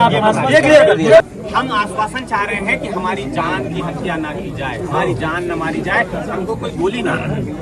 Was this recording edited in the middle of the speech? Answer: yes; 1 cut; at 1.2 s

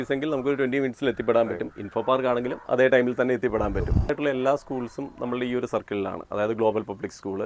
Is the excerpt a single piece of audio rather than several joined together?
no; 1 cut; at 4.1 s

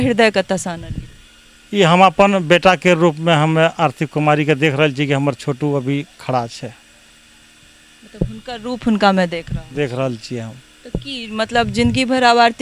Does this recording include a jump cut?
no; 0 cuts

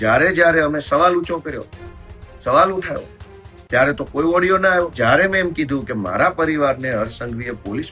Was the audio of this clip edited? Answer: yes; 1 cut; at 4.9 s

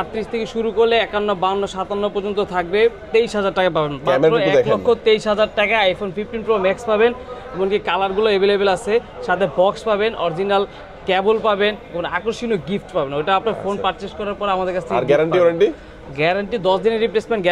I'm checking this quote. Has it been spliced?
no; 0 cuts

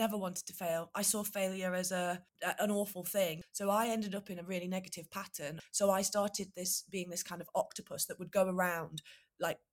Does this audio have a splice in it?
yes; 3 cuts; at 2.3 s, 3.4 s, 5.6 s

